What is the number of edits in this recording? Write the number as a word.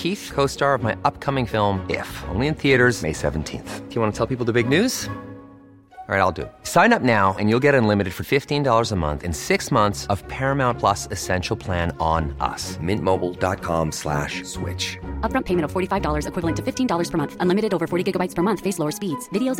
zero